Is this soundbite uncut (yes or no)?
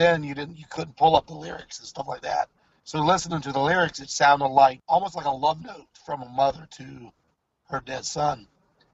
no